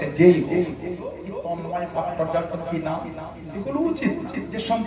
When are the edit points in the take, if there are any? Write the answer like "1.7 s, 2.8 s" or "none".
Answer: 1.3 s